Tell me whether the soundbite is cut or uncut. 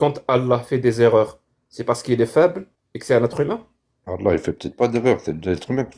uncut